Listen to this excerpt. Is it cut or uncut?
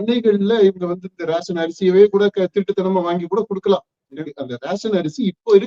cut